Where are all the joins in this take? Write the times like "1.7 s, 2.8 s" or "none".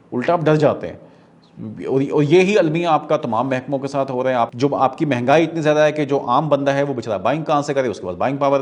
4.5 s